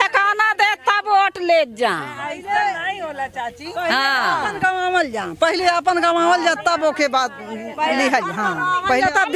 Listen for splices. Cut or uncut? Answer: uncut